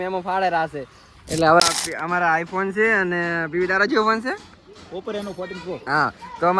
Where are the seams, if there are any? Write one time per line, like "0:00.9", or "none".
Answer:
0:01.6